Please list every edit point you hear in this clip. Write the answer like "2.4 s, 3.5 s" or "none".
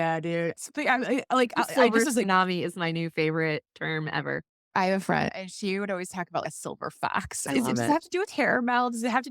4.7 s